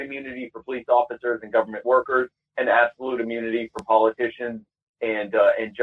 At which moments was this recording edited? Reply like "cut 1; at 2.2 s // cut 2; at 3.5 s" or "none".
none